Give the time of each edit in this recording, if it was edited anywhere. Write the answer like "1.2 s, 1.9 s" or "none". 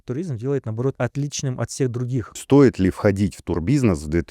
0.9 s, 2.4 s